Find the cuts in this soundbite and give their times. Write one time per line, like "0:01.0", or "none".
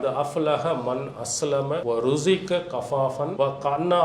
0:01.8
0:03.3